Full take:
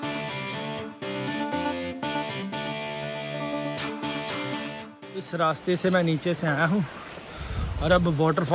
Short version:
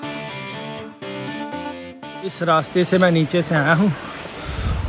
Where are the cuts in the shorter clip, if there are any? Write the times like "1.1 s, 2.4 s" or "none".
2.1 s